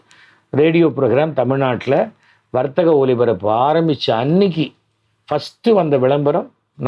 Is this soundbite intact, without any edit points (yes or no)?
yes